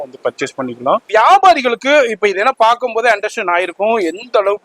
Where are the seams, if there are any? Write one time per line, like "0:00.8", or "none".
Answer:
0:01.0